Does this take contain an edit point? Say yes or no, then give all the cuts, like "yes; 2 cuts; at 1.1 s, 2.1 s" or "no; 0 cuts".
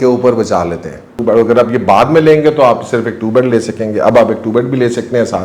yes; 1 cut; at 1.1 s